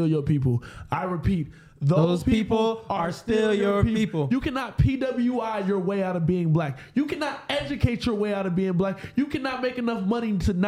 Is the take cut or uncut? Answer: uncut